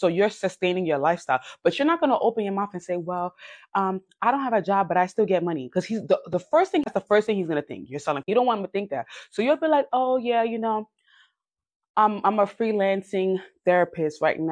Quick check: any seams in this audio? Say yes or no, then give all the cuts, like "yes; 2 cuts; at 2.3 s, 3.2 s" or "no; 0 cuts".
yes; 2 cuts; at 6.9 s, 8.3 s